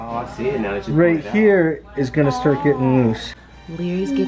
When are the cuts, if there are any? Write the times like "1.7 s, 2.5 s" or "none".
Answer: 3.4 s